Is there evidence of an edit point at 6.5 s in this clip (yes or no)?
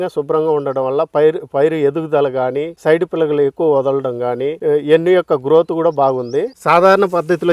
yes